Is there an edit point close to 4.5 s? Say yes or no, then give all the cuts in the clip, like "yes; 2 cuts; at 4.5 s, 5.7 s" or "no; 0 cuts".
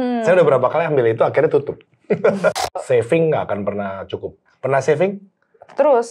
yes; 2 cuts; at 2.6 s, 4.5 s